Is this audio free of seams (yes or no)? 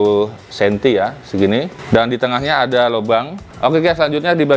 no